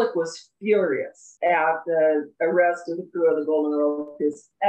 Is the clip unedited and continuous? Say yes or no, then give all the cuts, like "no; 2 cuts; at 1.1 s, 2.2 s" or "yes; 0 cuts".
no; 1 cut; at 1.2 s